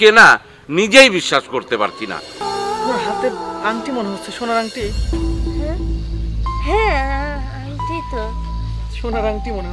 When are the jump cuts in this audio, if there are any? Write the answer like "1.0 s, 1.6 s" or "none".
2.4 s